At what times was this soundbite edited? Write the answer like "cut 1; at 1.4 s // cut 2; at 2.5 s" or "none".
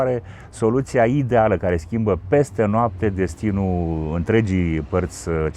none